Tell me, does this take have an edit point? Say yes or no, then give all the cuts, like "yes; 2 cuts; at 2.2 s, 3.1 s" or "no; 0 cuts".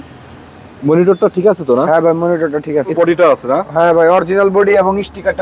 yes; 1 cut; at 2.9 s